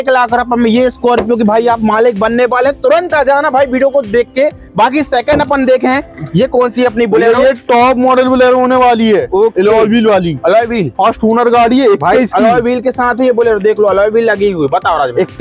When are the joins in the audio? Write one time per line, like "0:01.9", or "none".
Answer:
none